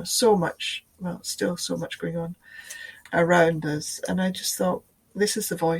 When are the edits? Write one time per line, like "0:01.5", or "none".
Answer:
none